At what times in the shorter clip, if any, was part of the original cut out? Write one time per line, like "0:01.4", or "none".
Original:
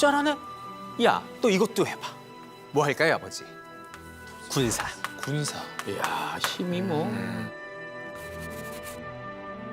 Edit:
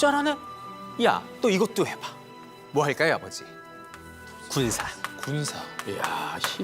none